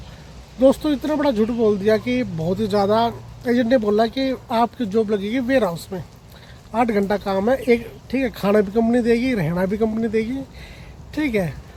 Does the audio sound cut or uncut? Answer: uncut